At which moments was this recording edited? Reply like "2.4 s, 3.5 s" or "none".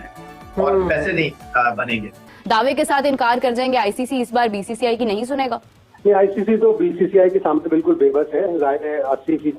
2.3 s